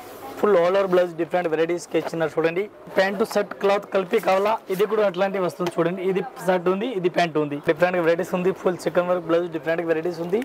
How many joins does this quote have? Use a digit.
2